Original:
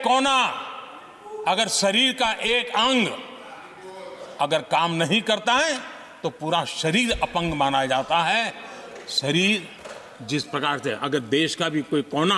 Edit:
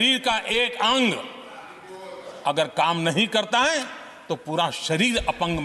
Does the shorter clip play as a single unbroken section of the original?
yes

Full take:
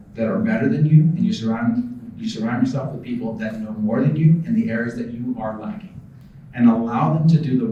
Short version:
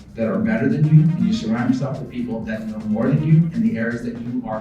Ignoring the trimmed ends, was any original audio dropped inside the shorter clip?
yes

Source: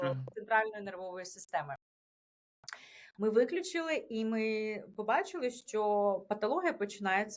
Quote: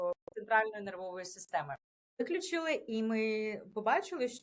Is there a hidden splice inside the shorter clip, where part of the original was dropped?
yes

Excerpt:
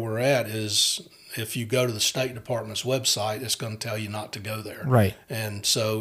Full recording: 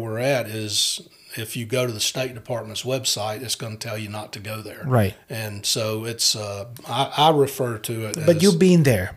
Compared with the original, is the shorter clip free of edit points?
yes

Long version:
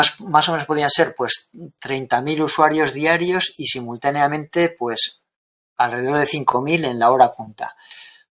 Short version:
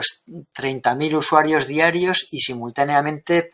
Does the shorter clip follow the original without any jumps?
yes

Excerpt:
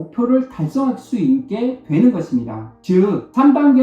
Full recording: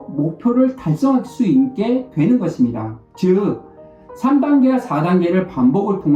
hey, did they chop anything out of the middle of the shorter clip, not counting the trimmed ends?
yes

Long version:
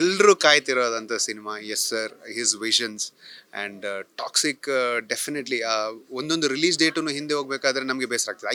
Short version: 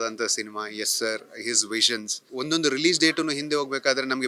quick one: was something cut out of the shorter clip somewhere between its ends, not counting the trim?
yes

